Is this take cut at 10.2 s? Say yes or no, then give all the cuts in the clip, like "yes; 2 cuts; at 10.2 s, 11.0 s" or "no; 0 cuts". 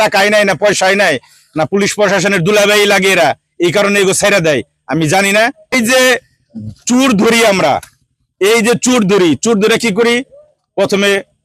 no; 1 cut; at 5.7 s